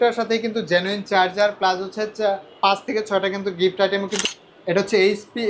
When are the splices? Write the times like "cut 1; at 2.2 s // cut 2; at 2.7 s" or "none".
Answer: cut 1; at 4.2 s